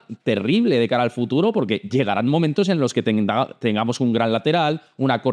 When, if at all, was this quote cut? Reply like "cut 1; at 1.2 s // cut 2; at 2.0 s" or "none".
none